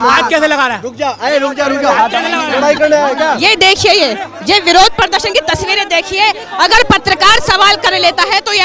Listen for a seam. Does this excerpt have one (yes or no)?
no